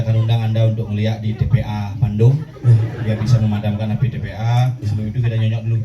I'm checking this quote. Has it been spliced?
no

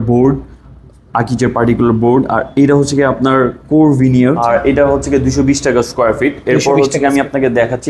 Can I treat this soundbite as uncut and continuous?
no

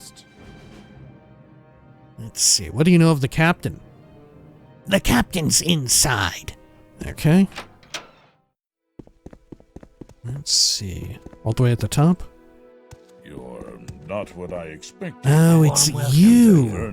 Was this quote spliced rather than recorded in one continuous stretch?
no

